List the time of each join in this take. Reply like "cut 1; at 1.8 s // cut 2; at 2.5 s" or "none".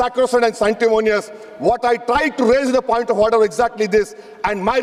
none